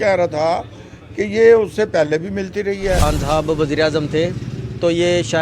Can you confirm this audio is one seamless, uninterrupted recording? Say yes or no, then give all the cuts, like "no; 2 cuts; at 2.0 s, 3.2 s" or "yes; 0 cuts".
no; 1 cut; at 3.0 s